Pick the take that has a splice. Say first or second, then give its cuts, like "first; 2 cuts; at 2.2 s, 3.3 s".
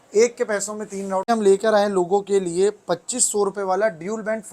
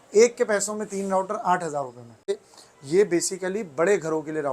first; 1 cut; at 1.3 s